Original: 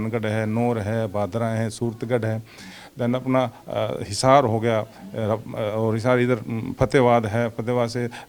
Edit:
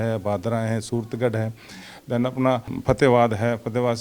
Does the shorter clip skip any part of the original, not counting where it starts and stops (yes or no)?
yes